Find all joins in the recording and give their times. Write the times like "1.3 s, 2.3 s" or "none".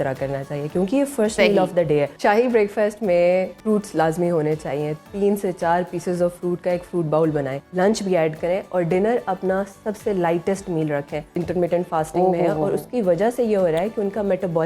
2.1 s, 3.6 s, 7.5 s, 11.4 s